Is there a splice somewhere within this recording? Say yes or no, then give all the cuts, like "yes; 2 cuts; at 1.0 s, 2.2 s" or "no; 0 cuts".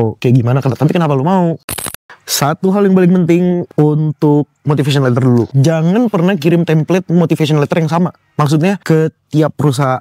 yes; 4 cuts; at 1.8 s, 3.7 s, 5.5 s, 8.8 s